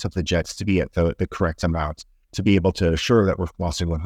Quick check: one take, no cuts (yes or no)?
yes